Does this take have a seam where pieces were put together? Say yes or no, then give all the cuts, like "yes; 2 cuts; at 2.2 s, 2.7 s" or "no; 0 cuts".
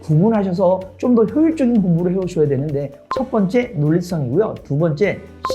yes; 1 cut; at 3.0 s